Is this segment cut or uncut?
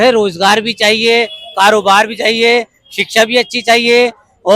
uncut